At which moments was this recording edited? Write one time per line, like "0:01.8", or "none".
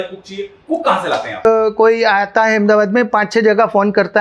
0:01.4